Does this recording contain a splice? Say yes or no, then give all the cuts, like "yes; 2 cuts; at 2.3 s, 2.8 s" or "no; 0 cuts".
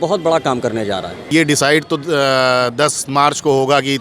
yes; 1 cut; at 1.3 s